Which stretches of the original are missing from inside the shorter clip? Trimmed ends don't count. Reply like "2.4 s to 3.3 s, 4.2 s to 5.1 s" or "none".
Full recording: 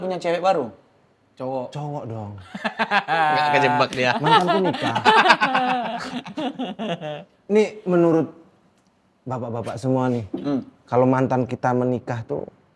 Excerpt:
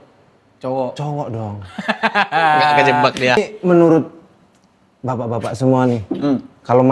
4.1 s to 7.6 s